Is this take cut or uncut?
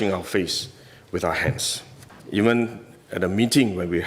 cut